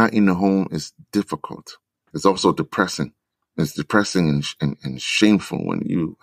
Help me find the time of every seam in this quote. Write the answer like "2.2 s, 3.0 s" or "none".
2.0 s